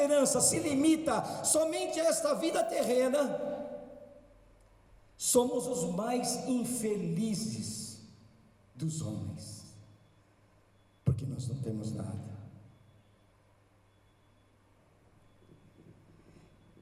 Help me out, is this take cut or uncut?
uncut